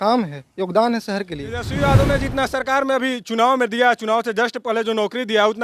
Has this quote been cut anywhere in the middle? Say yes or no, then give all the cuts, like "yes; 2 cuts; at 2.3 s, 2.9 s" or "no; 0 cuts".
yes; 1 cut; at 1.7 s